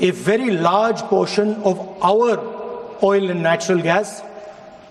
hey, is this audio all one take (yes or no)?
yes